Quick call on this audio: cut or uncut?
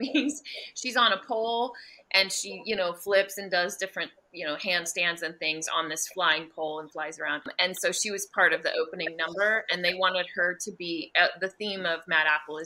uncut